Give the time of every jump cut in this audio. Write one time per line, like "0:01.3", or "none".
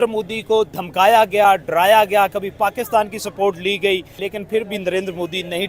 0:04.2